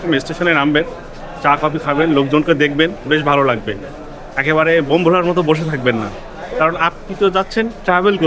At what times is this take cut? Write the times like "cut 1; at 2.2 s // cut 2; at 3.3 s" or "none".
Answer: none